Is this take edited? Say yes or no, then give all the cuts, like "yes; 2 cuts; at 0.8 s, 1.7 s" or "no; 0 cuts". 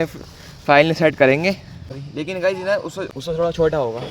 yes; 1 cut; at 3.2 s